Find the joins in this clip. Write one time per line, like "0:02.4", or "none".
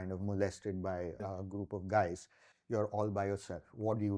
0:01.2